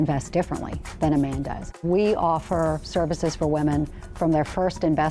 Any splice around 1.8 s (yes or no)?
yes